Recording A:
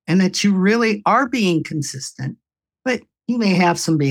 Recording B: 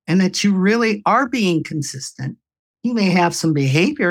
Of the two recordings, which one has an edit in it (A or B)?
B